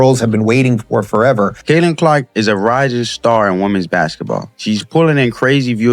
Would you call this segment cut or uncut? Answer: cut